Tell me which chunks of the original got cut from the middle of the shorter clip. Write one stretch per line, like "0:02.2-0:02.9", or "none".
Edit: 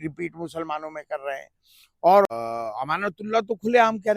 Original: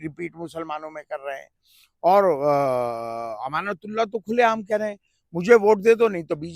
0:02.3-0:02.9